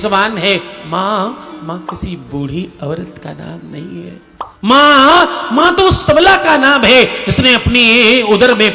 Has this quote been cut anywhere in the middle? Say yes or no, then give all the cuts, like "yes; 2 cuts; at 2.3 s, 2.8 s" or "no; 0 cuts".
yes; 1 cut; at 4.5 s